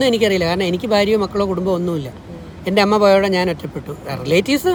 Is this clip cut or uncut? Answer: uncut